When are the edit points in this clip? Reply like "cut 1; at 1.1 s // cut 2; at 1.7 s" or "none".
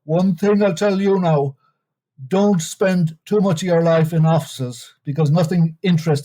none